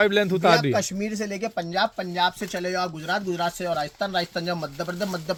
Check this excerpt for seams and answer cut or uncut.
uncut